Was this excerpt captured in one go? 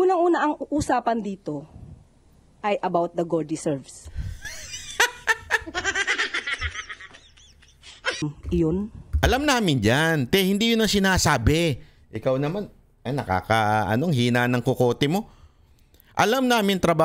no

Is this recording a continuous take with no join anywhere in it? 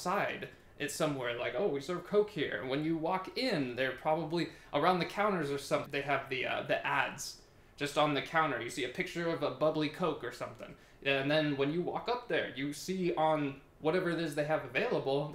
no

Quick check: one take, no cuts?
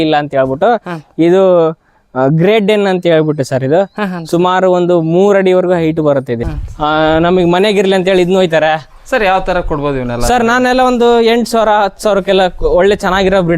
no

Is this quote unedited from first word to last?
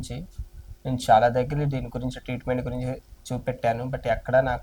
yes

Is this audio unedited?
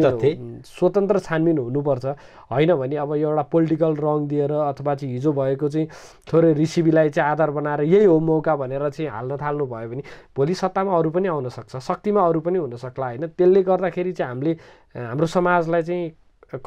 yes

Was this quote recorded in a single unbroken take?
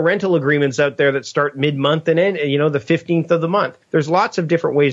no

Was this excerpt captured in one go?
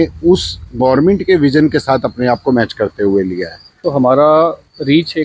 no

